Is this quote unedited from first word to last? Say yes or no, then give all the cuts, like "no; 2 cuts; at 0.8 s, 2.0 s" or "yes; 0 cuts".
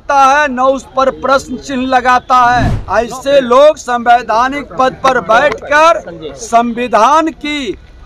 no; 1 cut; at 2.8 s